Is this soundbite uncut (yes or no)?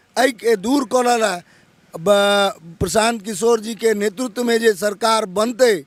yes